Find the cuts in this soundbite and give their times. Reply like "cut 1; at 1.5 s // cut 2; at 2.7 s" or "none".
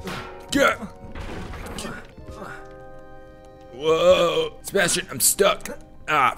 cut 1; at 2.1 s // cut 2; at 4.6 s